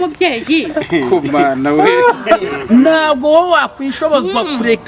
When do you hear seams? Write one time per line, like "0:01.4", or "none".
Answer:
0:02.5